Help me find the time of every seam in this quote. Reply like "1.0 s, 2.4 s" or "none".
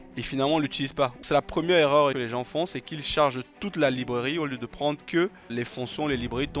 1.2 s, 2.2 s, 5.5 s